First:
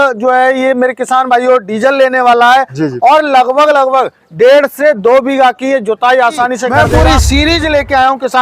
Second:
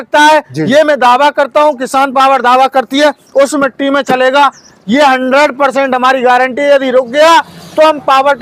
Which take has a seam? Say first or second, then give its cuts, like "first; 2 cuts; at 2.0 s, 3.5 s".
first; 1 cut; at 6.7 s